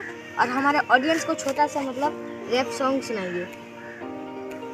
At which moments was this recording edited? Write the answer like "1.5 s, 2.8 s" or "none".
none